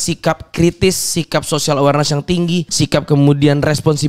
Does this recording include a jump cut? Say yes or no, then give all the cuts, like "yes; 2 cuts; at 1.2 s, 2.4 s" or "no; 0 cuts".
yes; 1 cut; at 2.7 s